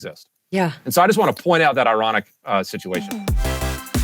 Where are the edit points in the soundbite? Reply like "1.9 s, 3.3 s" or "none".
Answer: 3.0 s